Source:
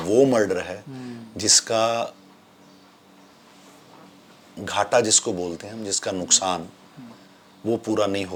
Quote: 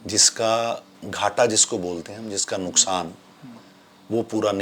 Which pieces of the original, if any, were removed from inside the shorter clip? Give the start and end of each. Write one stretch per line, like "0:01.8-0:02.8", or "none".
0:02.3-0:04.5